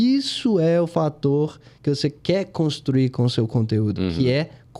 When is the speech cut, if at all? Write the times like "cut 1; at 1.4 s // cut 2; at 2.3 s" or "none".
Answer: none